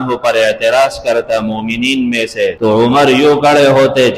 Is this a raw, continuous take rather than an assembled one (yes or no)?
no